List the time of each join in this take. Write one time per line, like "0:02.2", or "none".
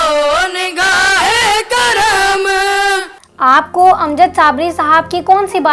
0:03.2